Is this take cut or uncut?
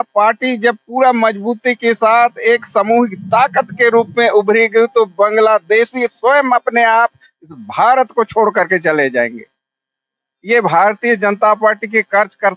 uncut